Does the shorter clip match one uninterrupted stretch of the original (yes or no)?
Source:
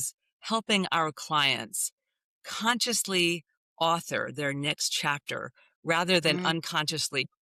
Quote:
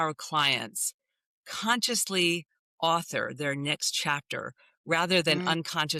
yes